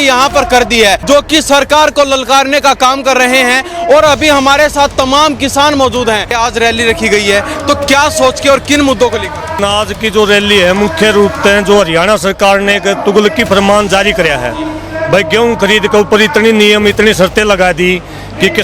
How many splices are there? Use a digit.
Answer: 3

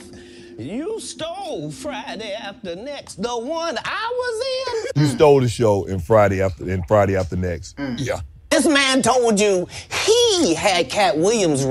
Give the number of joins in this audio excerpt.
1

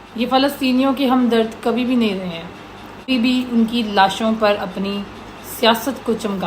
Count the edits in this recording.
1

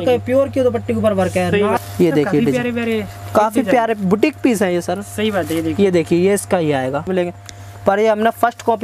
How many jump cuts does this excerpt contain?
2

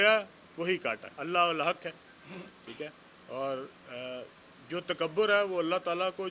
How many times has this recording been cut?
1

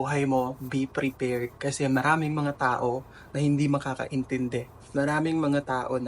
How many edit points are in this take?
1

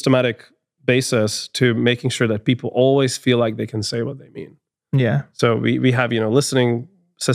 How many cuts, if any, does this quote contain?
0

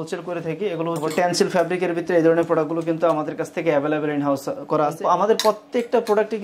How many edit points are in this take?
2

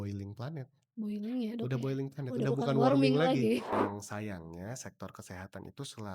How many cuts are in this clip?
1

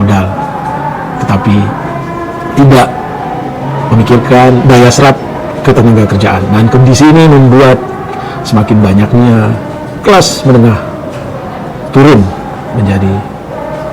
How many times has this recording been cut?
0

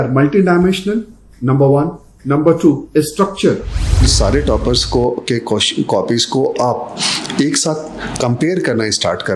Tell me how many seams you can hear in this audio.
1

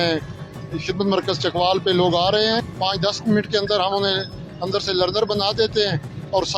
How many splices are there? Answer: 1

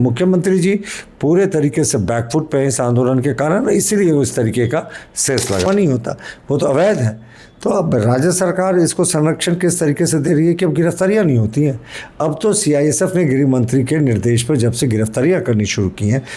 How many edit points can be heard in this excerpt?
1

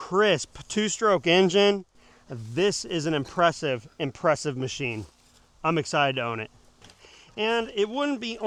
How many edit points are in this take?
0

